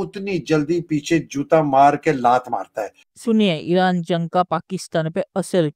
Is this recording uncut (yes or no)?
yes